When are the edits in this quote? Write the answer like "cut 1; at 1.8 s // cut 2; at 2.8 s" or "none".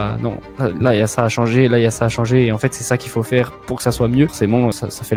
none